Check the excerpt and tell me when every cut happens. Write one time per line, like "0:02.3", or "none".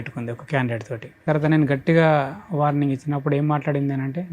0:01.2